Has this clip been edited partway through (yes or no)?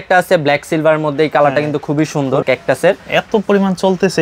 yes